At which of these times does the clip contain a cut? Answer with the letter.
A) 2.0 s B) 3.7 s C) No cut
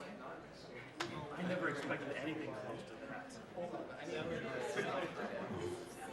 A